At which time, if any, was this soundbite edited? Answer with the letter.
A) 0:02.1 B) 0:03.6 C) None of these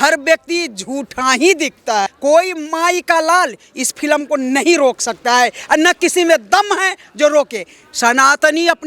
A